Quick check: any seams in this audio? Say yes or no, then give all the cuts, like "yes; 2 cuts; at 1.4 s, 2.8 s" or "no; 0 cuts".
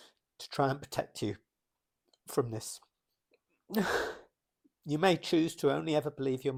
no; 0 cuts